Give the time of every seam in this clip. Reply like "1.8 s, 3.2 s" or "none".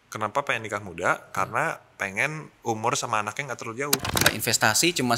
4.2 s